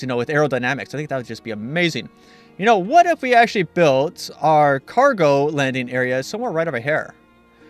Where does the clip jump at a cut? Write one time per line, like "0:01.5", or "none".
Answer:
0:01.9